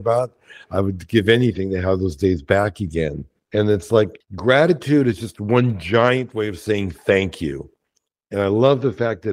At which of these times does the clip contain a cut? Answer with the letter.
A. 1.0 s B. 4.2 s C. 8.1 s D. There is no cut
B